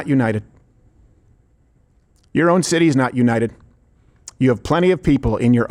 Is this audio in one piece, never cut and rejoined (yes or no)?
yes